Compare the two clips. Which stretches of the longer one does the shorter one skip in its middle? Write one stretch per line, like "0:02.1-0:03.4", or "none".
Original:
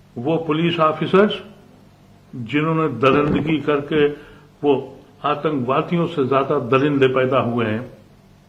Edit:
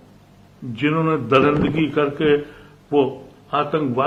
none

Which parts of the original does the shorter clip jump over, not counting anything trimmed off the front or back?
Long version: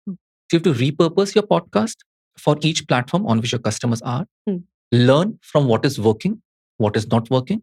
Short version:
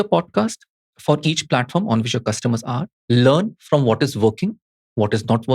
0:04.3-0:04.7

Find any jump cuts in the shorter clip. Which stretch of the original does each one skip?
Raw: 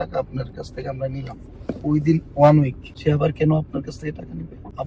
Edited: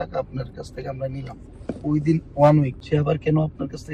0:02.8-0:02.9

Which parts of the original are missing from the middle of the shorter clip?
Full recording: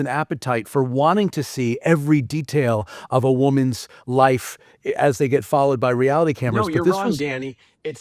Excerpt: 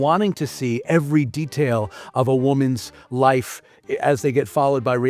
none

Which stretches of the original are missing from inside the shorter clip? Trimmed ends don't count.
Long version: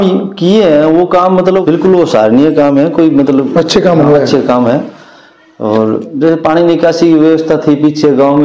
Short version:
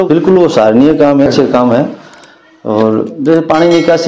0:02.8-0:04.2

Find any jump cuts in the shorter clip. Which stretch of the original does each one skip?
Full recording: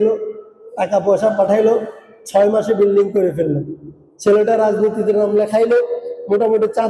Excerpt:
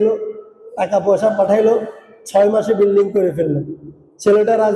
none

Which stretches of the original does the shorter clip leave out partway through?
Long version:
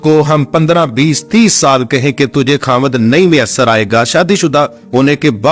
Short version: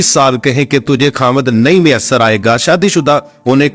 none

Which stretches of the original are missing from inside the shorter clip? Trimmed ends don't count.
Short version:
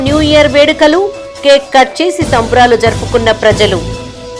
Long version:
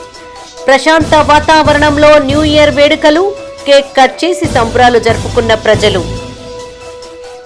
none

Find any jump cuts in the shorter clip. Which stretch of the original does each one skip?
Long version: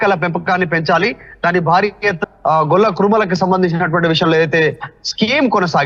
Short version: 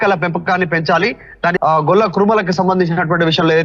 0:01.6-0:02.4

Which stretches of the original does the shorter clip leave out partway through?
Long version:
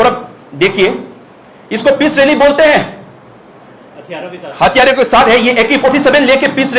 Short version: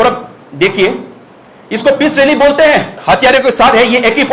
0:02.9-0:04.5

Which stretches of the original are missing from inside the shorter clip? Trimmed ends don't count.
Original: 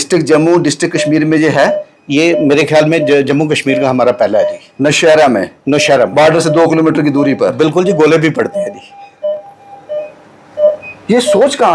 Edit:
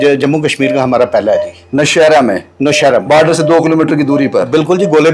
none

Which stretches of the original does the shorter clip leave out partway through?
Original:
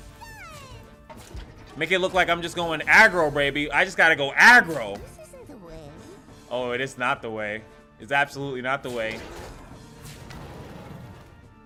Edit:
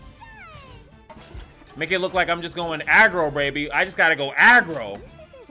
none

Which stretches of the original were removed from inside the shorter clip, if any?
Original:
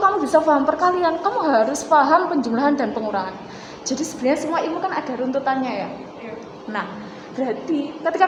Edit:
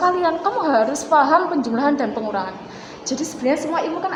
none

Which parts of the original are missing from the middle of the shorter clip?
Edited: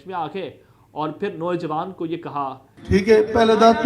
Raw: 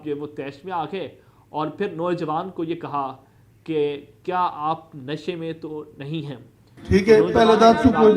0:03.3-0:06.7

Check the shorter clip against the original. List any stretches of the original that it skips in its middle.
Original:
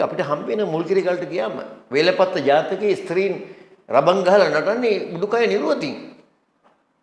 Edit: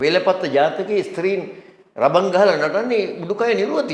none

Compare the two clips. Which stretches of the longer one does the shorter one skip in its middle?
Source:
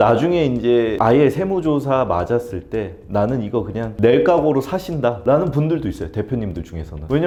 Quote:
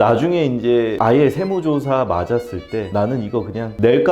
0:02.9-0:03.1

